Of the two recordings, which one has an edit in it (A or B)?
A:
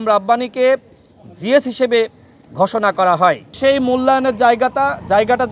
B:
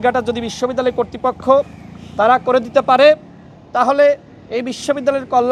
A